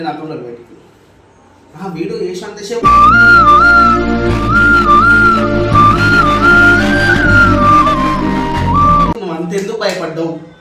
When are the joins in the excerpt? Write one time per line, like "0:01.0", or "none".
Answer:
none